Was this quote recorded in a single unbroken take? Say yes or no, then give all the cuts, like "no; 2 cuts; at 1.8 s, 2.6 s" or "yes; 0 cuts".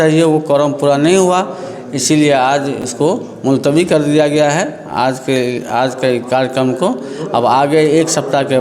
yes; 0 cuts